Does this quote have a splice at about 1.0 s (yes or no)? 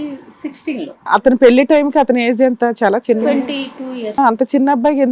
yes